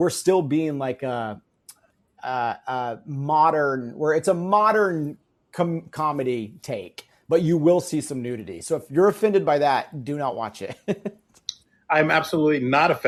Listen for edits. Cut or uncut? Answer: uncut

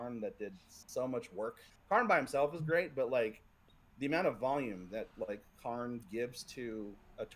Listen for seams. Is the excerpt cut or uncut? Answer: cut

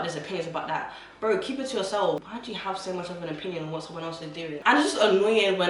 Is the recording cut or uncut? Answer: cut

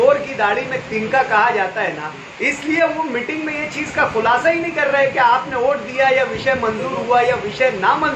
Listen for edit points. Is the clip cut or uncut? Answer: uncut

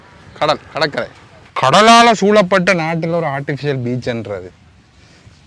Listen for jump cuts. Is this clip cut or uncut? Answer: cut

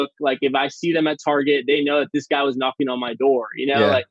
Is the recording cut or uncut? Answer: uncut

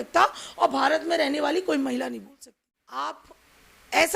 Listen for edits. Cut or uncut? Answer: cut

